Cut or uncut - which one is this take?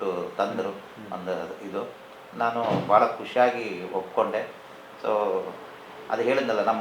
uncut